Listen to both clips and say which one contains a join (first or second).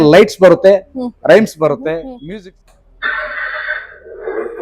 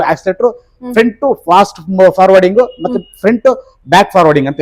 first